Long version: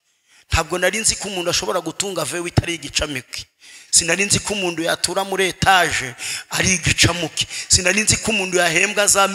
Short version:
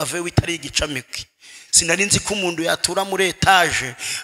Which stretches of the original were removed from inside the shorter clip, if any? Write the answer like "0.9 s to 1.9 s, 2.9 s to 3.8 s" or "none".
none